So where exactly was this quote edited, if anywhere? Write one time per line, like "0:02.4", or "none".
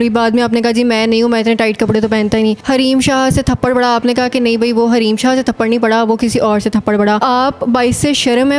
0:02.6
0:07.2